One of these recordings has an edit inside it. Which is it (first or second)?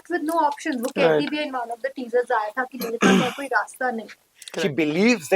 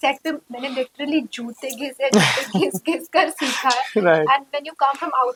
first